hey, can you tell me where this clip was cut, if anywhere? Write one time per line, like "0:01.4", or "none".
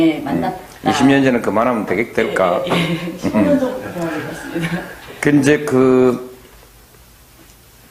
0:03.5